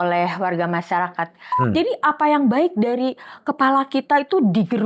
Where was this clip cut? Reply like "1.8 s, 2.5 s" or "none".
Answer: 1.5 s